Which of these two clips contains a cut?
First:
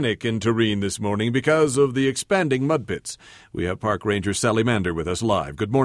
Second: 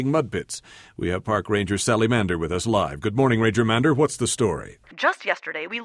second; 1 cut; at 4.8 s

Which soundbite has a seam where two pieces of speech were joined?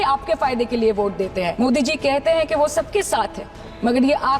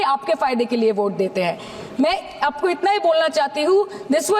first; 1 cut; at 1.5 s

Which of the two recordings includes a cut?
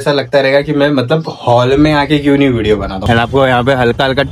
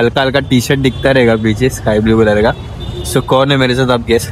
first; 1 cut; at 2.9 s

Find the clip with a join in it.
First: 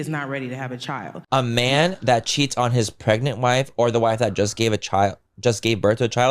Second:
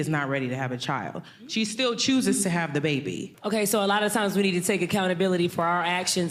first; 1 cut; at 1.2 s

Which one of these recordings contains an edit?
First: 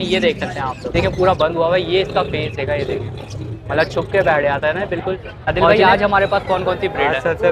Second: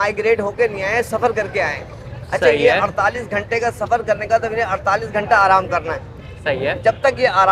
first; 2 cuts; at 0.9 s, 5.7 s

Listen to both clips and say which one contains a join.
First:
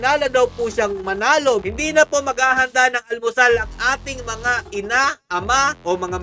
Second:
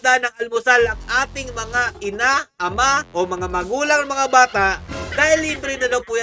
first; 1 cut; at 1.6 s

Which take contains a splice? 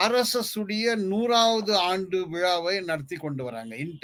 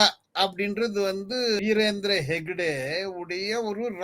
second; 1 cut; at 1.6 s

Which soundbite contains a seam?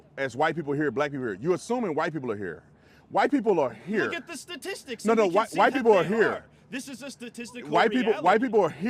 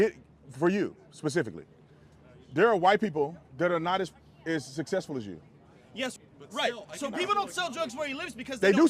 second; 1 cut; at 6.1 s

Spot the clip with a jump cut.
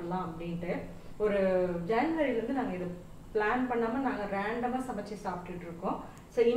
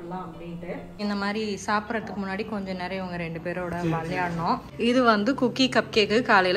second; 2 cuts; at 1.0 s, 4.7 s

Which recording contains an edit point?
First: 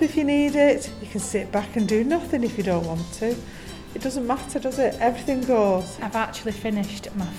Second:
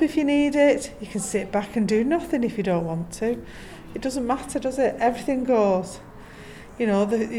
first; 1 cut; at 6.0 s

